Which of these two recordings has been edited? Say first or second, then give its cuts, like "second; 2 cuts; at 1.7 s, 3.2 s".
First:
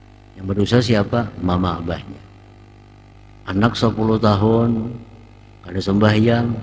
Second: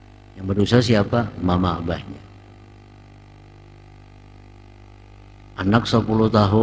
first; 1 cut; at 3.2 s